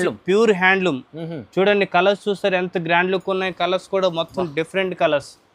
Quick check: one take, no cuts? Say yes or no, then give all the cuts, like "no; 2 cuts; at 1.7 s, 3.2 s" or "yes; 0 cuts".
yes; 0 cuts